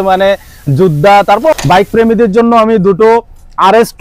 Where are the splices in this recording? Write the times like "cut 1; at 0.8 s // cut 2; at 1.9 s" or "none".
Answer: cut 1; at 1.5 s